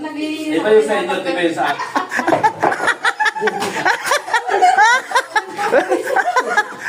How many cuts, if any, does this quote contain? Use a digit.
1